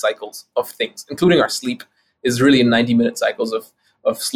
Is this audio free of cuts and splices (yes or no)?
yes